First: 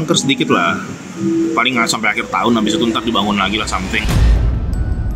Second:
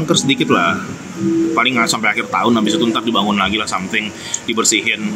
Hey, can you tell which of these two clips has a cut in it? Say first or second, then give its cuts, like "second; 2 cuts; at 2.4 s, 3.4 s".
first; 1 cut; at 4.0 s